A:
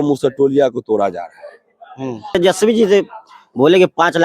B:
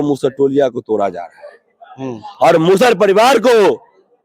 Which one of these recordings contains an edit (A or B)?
A